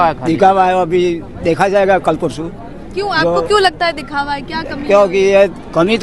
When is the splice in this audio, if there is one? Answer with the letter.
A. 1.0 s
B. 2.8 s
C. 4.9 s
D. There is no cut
D